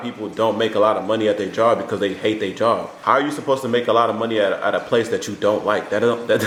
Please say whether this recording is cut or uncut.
uncut